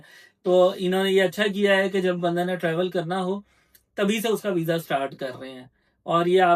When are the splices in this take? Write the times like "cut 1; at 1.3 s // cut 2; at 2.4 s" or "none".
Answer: none